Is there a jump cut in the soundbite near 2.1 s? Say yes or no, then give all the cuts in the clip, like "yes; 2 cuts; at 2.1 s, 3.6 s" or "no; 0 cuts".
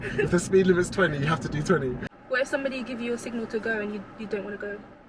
yes; 1 cut; at 2.1 s